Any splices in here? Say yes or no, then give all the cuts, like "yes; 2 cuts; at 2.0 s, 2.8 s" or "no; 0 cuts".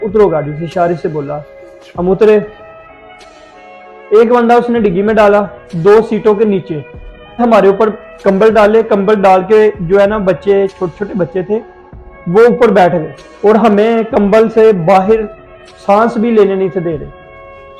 yes; 1 cut; at 7.4 s